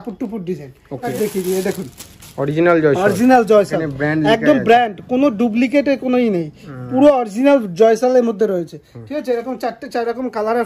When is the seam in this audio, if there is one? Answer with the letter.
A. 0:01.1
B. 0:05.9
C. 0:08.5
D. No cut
A